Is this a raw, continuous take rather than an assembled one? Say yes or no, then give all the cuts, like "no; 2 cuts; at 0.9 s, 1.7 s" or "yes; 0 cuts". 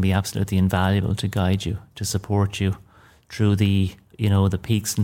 yes; 0 cuts